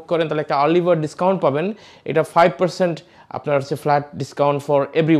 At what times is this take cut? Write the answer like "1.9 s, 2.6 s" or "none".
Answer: none